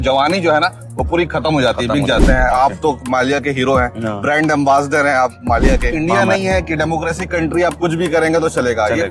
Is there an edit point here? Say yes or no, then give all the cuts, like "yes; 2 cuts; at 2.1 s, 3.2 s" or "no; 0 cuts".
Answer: yes; 2 cuts; at 2.3 s, 5.9 s